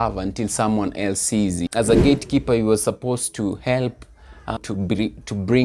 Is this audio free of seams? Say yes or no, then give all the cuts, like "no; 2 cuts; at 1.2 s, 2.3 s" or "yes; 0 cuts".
no; 2 cuts; at 1.6 s, 4.6 s